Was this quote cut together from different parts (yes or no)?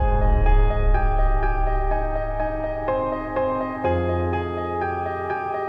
no